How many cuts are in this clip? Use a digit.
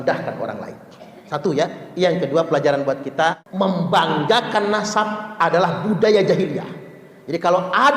1